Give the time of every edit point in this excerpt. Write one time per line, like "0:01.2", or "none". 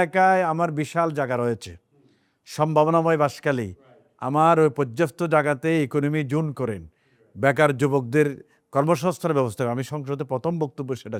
none